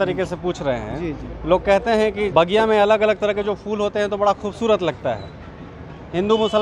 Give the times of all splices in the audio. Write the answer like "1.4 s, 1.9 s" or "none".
2.3 s